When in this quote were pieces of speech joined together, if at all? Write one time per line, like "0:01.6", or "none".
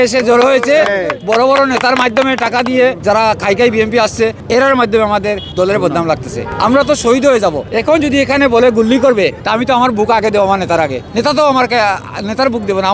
0:03.0
0:04.4
0:05.5
0:06.5
0:07.7
0:09.4
0:11.0